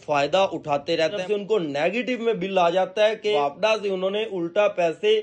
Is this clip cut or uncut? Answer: cut